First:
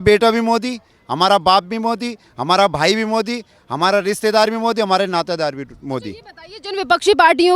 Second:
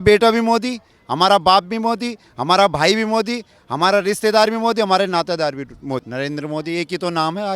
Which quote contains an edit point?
second; 1 cut; at 6.1 s

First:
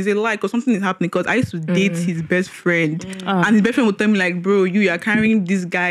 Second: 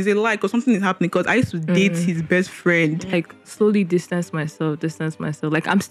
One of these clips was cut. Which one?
second; 1 cut; at 3.1 s

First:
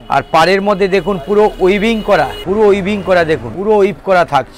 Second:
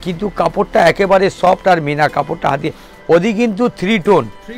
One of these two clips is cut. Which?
first; 2 cuts; at 2.4 s, 3.5 s

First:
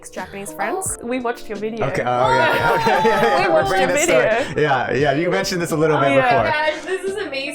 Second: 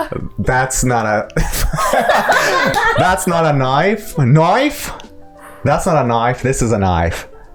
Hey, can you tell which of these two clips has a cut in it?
first; 1 cut; at 0.9 s

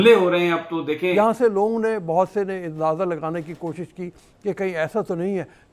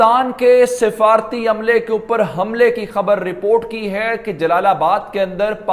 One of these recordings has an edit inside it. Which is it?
first; 1 cut; at 1.1 s

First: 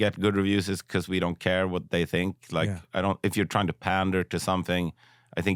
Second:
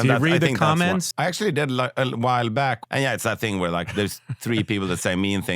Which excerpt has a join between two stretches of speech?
second; 2 cuts; at 1.1 s, 2.8 s

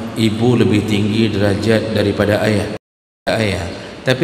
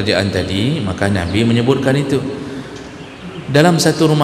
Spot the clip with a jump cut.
first; 1 cut; at 3.3 s

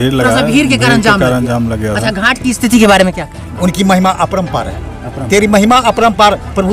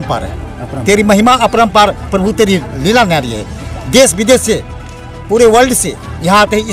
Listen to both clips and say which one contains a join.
first; 1 cut; at 3.5 s

